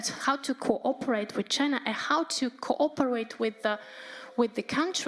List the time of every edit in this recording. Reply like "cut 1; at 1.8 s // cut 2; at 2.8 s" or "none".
none